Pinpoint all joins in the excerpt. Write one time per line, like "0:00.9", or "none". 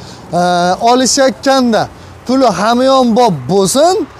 none